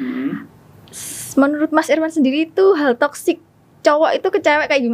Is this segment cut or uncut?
uncut